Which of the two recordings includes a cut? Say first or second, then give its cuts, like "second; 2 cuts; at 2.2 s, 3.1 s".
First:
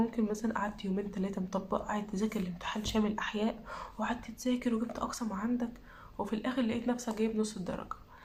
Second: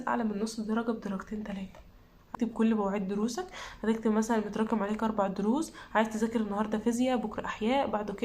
second; 1 cut; at 2.2 s